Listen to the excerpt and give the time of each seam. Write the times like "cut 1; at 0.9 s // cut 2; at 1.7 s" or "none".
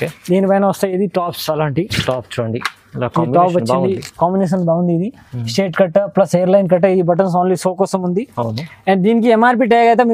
none